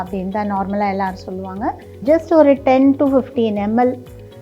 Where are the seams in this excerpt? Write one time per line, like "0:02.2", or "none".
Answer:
0:01.9